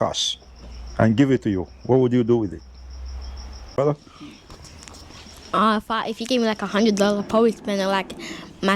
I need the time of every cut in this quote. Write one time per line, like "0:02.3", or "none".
0:03.8